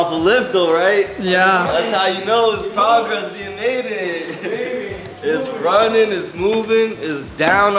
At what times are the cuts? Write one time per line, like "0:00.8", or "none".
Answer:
none